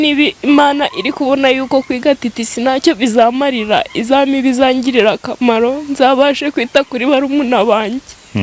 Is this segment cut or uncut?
uncut